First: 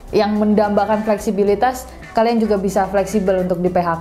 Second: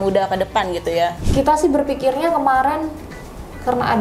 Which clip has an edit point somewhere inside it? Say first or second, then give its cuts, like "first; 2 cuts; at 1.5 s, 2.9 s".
second; 1 cut; at 1.2 s